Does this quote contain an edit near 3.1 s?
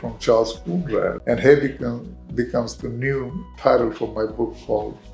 no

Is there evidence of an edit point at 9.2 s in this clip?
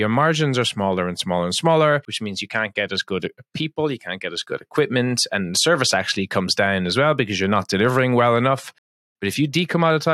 yes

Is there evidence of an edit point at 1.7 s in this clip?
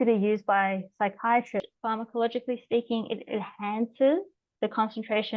yes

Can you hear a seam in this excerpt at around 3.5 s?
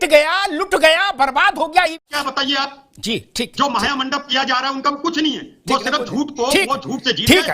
no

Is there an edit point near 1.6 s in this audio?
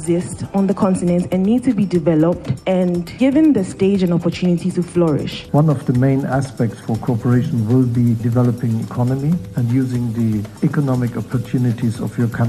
no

